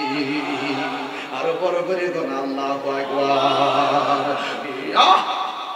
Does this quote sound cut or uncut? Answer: cut